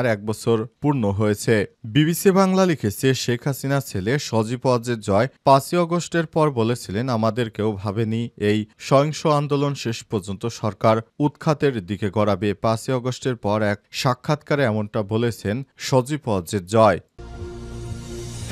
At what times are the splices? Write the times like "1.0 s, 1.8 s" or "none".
17.1 s